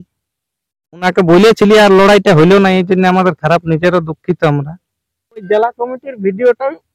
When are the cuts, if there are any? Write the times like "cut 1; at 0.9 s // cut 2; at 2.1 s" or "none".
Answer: cut 1; at 1.0 s // cut 2; at 5.4 s